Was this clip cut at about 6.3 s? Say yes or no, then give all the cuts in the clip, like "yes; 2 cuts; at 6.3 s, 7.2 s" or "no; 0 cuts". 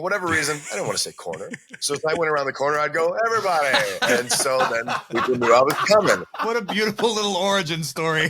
yes; 1 cut; at 6.3 s